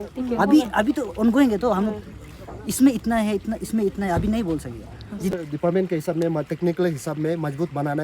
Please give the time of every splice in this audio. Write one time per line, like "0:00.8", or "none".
0:05.3